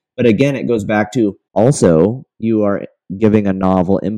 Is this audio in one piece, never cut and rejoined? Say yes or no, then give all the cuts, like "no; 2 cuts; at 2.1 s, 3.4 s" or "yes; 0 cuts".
no; 1 cut; at 1.4 s